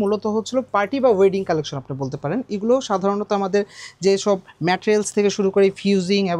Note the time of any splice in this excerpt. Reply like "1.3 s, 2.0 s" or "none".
none

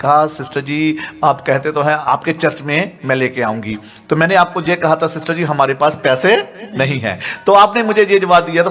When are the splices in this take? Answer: 2.0 s

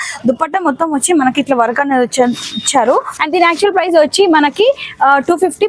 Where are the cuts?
3.2 s

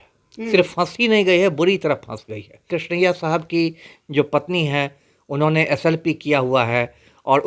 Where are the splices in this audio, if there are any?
2.7 s

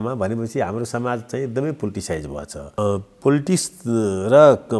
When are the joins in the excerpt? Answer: 2.8 s

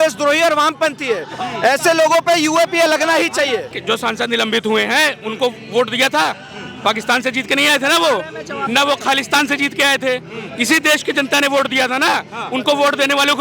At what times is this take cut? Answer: 3.7 s

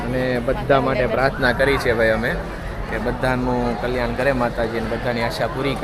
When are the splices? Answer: none

